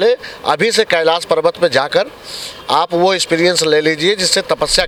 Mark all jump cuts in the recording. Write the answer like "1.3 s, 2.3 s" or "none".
none